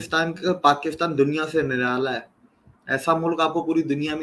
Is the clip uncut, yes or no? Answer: yes